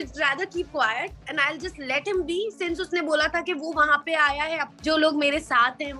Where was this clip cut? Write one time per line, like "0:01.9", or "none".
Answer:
0:04.7